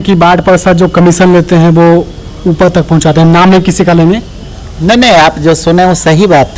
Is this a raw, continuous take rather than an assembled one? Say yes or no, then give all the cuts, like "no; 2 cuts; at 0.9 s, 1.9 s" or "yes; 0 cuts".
yes; 0 cuts